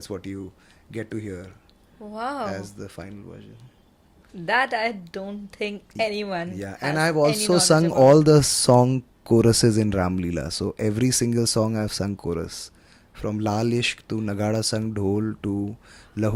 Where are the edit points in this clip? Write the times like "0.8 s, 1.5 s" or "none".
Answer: none